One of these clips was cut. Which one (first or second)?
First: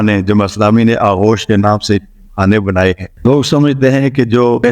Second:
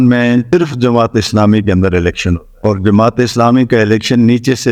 first